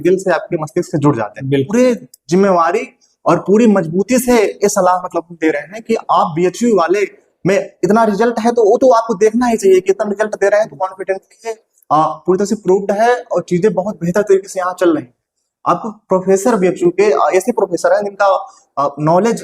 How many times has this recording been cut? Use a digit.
1